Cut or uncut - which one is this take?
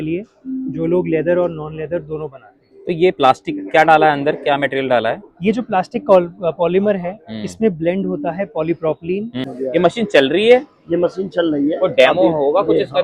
cut